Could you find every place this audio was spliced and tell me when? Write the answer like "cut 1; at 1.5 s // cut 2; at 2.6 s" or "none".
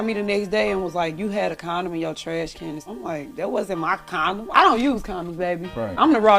cut 1; at 2.9 s // cut 2; at 4.5 s